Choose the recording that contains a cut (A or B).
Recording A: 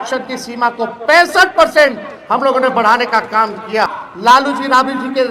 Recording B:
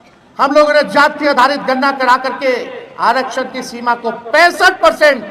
A